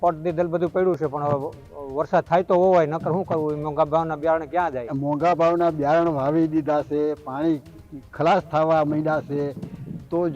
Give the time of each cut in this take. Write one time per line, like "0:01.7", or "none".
0:04.9